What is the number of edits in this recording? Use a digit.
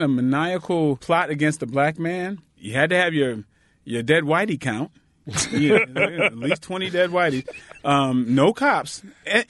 2